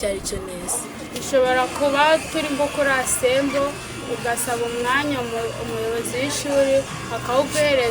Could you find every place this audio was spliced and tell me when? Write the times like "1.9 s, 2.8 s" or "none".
0.9 s